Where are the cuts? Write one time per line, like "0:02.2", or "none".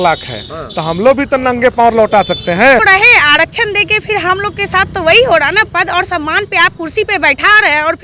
0:02.8